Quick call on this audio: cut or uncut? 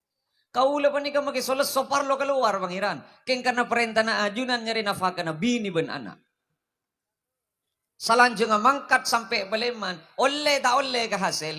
uncut